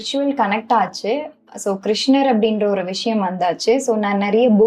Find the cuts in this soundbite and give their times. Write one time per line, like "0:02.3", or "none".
none